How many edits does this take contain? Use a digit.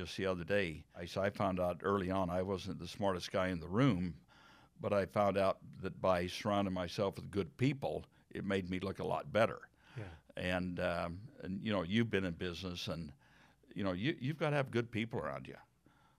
1